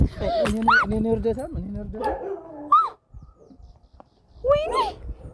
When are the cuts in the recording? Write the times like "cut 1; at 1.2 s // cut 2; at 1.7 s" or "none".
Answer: none